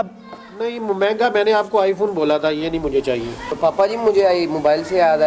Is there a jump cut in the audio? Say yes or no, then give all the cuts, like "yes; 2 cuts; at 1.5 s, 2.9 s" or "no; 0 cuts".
yes; 1 cut; at 3.6 s